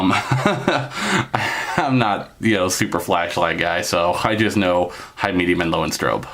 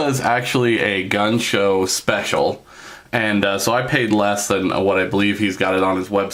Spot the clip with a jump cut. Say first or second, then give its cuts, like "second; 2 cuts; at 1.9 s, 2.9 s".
first; 1 cut; at 0.9 s